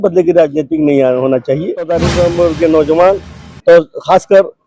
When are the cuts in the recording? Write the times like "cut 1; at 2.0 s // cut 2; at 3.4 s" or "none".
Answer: cut 1; at 1.9 s